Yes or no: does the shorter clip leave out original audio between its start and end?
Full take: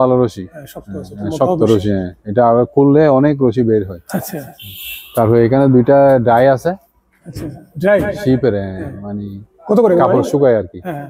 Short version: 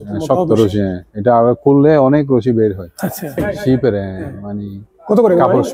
yes